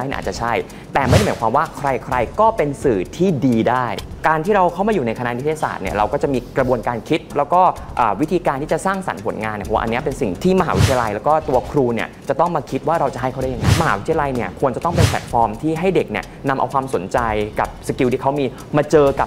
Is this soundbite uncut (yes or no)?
no